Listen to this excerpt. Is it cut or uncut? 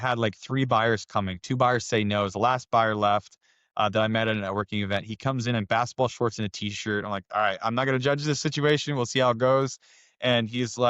uncut